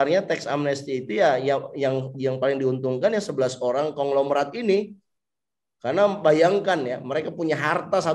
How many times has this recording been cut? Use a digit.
0